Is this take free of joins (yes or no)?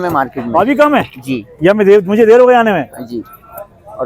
yes